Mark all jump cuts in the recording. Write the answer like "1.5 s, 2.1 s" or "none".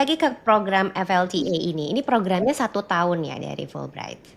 none